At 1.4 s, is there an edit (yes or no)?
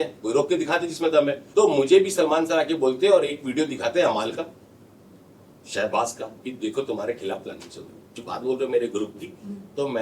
yes